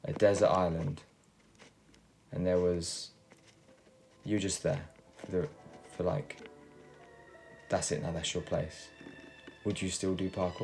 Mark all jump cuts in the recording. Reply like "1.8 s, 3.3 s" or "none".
none